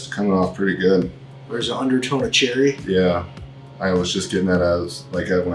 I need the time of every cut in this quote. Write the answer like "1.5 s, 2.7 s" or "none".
none